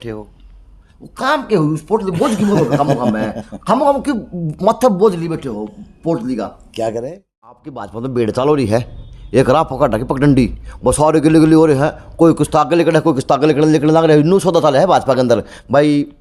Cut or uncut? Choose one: cut